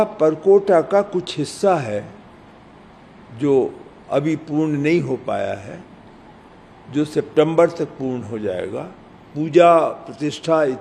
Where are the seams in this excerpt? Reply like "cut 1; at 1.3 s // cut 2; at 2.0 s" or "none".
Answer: cut 1; at 9.3 s